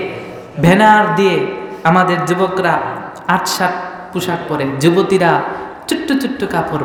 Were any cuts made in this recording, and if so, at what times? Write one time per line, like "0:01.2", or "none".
none

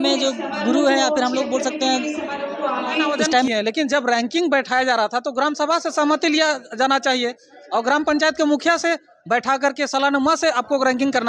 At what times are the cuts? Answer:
0:03.5

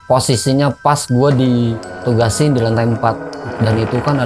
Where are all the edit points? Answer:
none

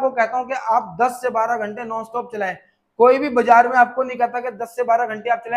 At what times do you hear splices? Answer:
none

